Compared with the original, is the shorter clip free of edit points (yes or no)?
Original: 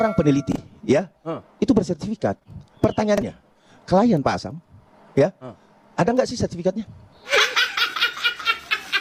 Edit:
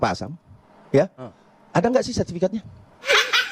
yes